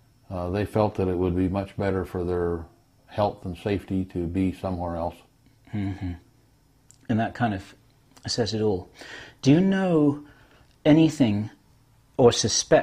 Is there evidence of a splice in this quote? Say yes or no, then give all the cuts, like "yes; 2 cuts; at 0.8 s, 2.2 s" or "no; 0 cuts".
no; 0 cuts